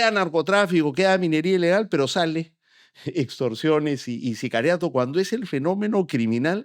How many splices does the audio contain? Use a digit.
0